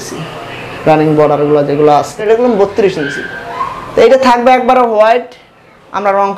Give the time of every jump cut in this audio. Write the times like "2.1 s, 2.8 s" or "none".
2.2 s